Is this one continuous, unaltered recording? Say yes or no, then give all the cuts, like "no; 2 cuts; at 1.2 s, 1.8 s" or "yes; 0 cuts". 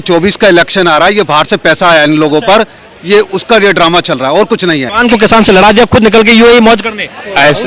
no; 1 cut; at 4.9 s